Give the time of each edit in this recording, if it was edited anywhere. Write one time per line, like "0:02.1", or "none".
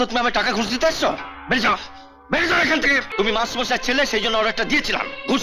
0:03.1